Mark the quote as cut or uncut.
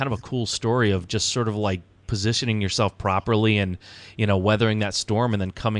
uncut